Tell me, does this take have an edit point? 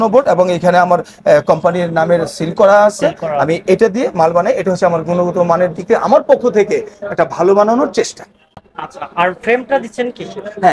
no; 0 cuts

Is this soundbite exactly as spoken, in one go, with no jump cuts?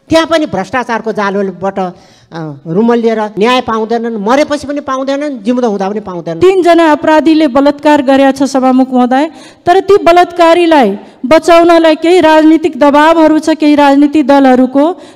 no; 2 cuts; at 3.3 s, 6.2 s

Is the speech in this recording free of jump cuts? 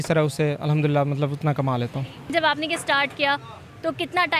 no; 1 cut; at 2.3 s

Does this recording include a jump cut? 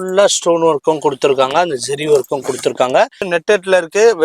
yes; 1 cut; at 3.3 s

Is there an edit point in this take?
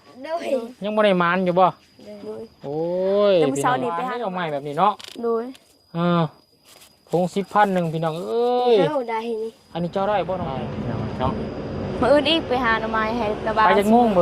yes; 2 cuts; at 4.1 s, 10.5 s

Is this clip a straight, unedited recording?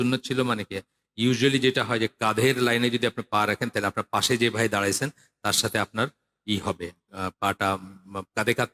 yes; 0 cuts

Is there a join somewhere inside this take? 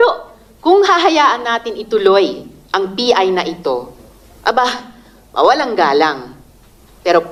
no; 0 cuts

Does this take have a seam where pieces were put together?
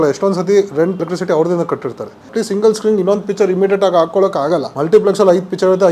yes; 3 cuts; at 1.0 s, 2.2 s, 4.7 s

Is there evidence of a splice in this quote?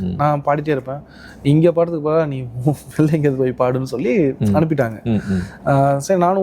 no; 0 cuts

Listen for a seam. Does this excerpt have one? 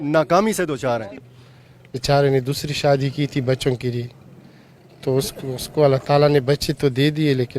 yes; 1 cut; at 1.2 s

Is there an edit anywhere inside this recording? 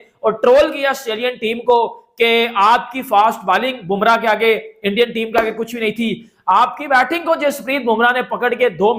no; 0 cuts

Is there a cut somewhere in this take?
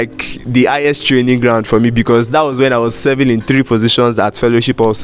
no; 0 cuts

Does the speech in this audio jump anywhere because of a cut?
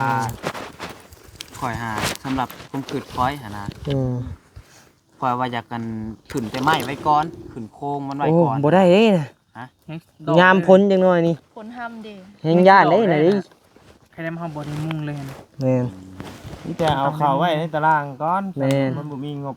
no; 0 cuts

